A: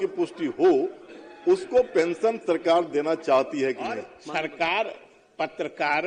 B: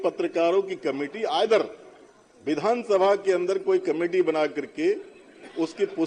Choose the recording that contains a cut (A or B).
A